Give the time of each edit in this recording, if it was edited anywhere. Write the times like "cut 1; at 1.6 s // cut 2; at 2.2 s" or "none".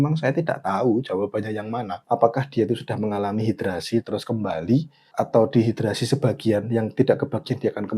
cut 1; at 1.9 s // cut 2; at 5.0 s